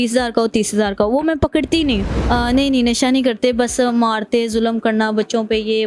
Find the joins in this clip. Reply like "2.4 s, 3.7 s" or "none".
2.0 s